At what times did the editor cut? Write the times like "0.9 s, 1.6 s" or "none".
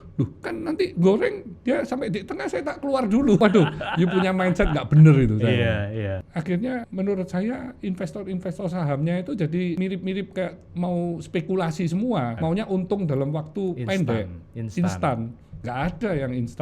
3.4 s, 6.1 s, 6.9 s, 9.8 s, 12.4 s